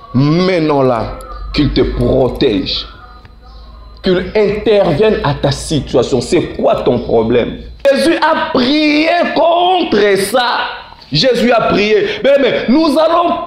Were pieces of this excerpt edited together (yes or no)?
yes